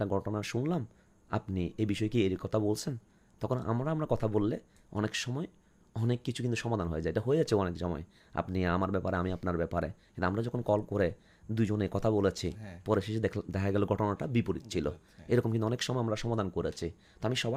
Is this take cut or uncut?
uncut